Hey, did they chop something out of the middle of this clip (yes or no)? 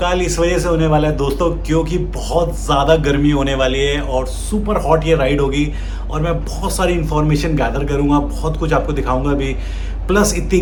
no